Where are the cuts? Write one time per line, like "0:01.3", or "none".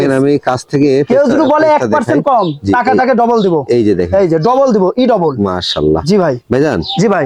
none